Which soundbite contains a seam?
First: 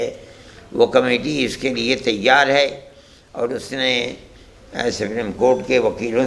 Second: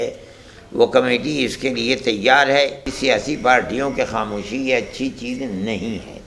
second; 1 cut; at 2.9 s

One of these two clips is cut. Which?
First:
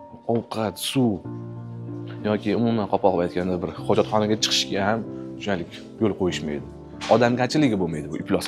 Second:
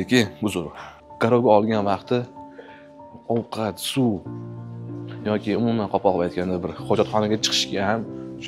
second; 1 cut; at 1.0 s

